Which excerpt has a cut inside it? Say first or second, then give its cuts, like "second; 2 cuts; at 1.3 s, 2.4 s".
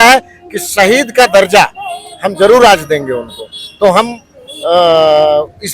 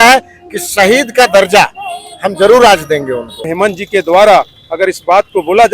second; 1 cut; at 3.5 s